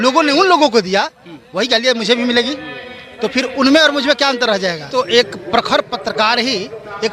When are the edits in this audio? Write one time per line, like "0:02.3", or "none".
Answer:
0:04.8